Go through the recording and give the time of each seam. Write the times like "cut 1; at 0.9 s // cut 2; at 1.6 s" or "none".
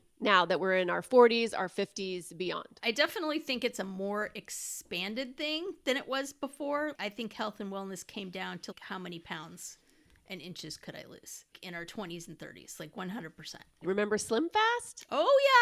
cut 1; at 2.8 s // cut 2; at 7.0 s // cut 3; at 8.7 s // cut 4; at 11.5 s // cut 5; at 13.8 s